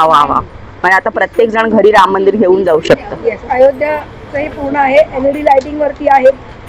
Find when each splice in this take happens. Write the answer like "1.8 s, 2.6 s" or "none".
none